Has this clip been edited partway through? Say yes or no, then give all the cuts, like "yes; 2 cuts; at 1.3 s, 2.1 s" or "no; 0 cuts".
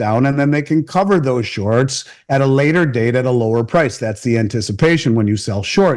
no; 0 cuts